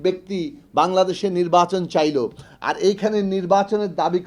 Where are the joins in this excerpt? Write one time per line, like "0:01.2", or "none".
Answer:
none